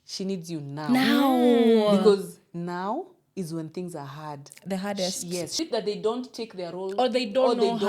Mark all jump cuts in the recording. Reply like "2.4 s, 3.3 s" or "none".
5.5 s